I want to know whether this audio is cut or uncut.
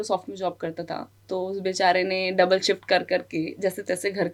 uncut